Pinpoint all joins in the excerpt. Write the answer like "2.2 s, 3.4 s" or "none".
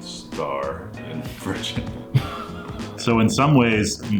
2.9 s